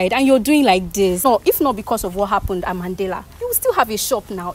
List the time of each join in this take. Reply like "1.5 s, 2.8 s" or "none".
1.2 s